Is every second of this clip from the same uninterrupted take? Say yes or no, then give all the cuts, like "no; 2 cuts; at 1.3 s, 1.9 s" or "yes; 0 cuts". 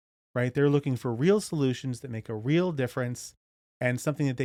yes; 0 cuts